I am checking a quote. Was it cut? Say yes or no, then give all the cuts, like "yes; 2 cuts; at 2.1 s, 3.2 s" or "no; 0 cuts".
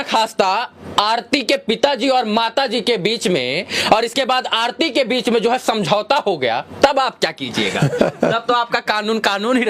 no; 0 cuts